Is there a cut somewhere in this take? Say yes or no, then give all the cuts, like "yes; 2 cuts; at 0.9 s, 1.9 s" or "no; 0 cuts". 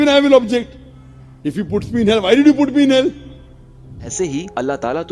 yes; 1 cut; at 4.0 s